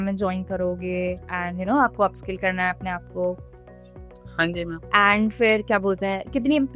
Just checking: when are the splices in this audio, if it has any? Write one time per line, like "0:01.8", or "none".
0:04.8